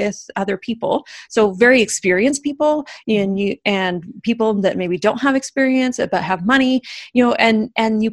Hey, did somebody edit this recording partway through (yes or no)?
no